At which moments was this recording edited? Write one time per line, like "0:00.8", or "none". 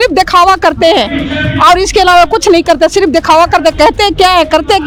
none

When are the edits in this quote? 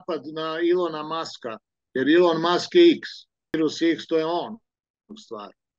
0:03.6

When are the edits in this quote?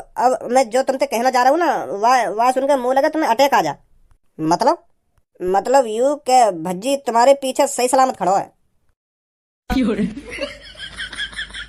none

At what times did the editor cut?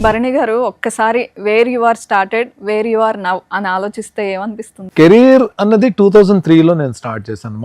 0:04.7

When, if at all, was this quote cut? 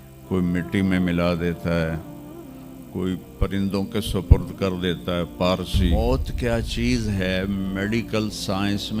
0:05.9

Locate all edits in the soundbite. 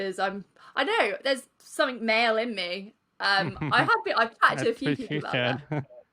none

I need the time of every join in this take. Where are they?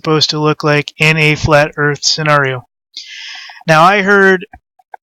none

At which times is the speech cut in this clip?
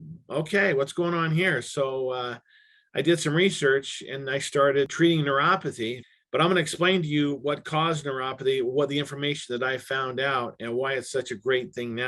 0:04.9
0:06.0

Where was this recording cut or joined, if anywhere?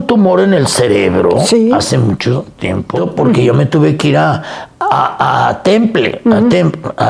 0:02.9

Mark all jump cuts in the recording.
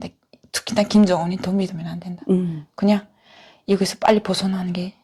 none

